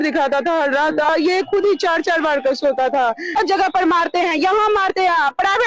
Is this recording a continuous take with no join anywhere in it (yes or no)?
no